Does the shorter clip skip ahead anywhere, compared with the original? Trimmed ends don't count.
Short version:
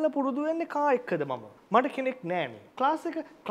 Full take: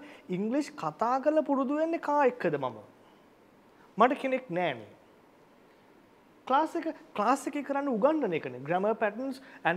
yes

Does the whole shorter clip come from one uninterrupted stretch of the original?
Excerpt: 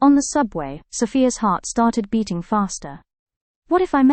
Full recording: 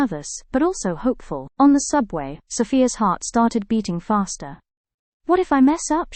yes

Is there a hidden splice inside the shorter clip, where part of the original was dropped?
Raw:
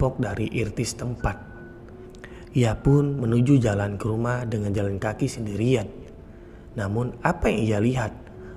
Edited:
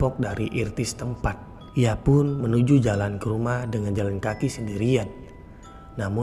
yes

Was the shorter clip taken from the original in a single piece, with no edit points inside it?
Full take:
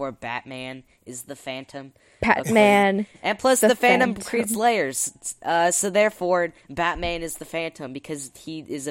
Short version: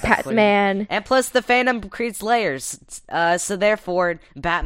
no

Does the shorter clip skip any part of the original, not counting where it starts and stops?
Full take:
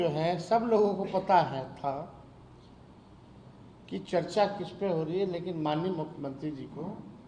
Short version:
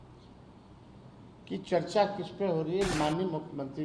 yes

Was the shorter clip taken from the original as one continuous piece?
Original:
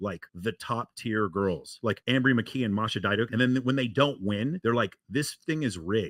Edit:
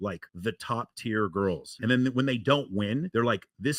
no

